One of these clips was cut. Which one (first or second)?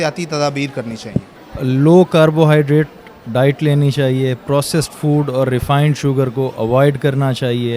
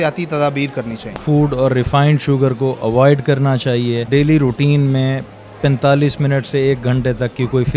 second